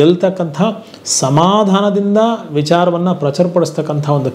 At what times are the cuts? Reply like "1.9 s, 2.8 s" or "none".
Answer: none

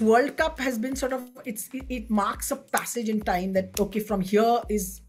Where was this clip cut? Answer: none

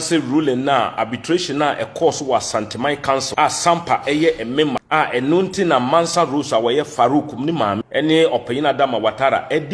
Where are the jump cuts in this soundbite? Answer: 3.3 s, 4.8 s, 7.8 s

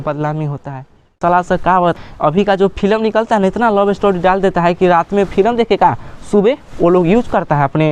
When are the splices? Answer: 1.1 s, 1.9 s

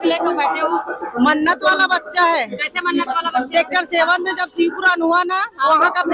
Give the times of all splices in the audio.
none

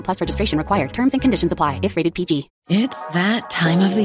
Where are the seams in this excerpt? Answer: 2.5 s

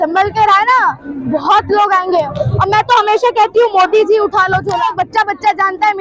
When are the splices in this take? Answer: 4.9 s

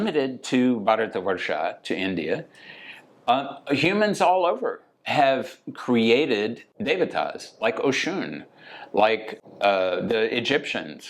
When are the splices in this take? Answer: 6.6 s, 9.3 s

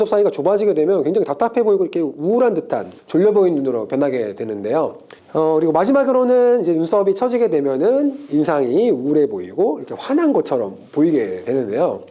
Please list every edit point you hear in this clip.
5.0 s

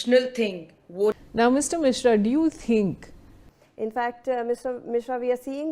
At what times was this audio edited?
1.2 s, 3.6 s

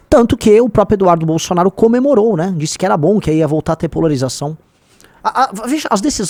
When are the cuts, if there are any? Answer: none

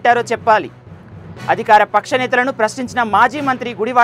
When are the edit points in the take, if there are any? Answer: none

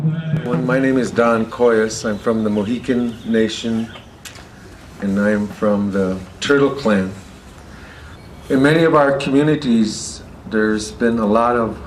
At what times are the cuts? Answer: none

